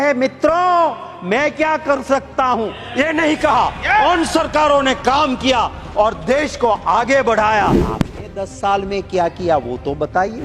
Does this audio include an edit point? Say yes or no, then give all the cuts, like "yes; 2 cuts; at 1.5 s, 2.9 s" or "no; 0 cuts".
yes; 1 cut; at 7.8 s